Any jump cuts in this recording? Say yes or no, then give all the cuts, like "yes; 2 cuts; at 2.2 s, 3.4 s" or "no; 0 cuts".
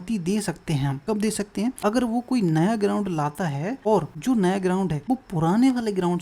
yes; 4 cuts; at 1.0 s, 1.8 s, 4.0 s, 5.0 s